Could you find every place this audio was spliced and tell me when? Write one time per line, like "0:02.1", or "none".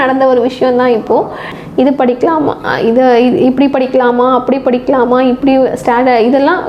0:01.5